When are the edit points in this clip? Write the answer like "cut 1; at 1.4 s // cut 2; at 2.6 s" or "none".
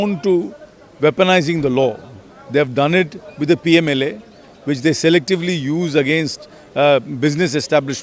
none